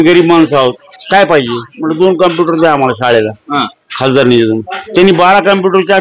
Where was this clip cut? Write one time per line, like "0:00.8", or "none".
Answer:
0:00.9

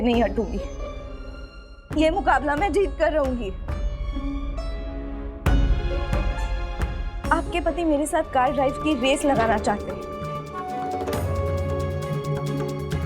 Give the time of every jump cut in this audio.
0:09.8

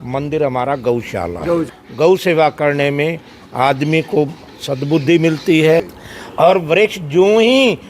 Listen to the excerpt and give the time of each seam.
0:01.8
0:06.0

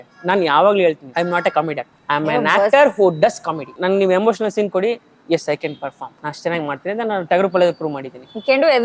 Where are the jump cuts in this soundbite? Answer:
0:01.0
0:01.9
0:03.8
0:06.1

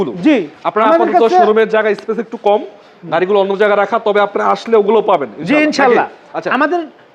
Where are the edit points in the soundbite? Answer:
none

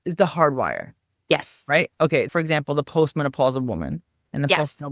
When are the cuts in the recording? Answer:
0:02.3

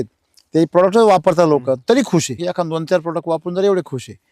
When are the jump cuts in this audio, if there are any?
0:02.4

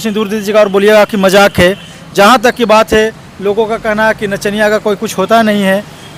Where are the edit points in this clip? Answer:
none

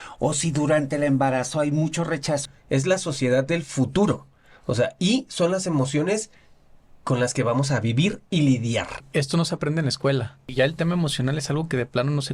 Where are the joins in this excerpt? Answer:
0:02.5
0:09.0
0:10.5

